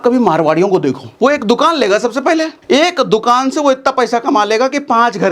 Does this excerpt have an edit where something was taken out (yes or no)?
yes